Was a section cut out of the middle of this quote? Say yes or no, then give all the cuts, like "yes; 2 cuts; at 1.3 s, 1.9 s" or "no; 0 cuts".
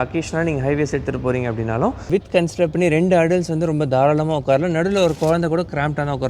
yes; 1 cut; at 2.1 s